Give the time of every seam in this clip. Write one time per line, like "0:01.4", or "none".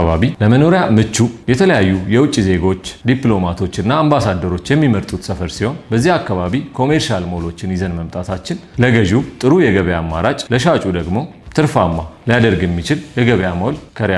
0:02.9
0:05.8
0:08.7
0:10.4